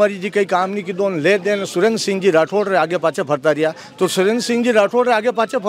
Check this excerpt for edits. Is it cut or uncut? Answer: uncut